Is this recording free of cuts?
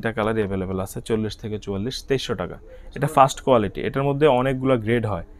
yes; 0 cuts

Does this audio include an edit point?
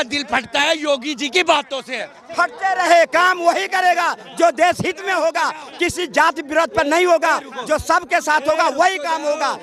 no; 0 cuts

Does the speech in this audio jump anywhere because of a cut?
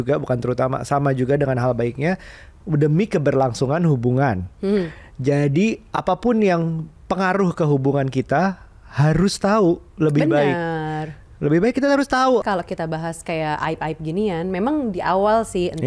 yes; 1 cut; at 12.4 s

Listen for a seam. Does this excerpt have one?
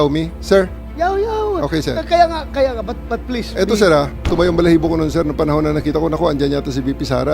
yes; 1 cut; at 4.2 s

